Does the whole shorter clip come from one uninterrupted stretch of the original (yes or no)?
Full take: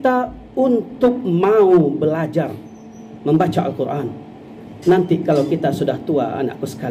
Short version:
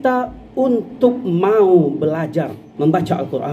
no